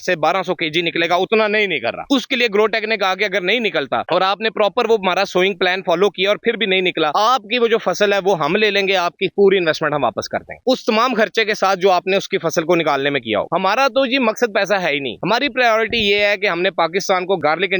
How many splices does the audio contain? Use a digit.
2